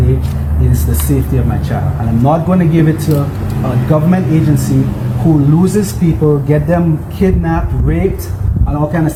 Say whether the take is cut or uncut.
uncut